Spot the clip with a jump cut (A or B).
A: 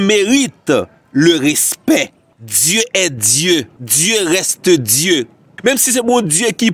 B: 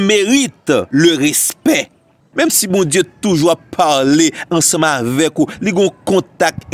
B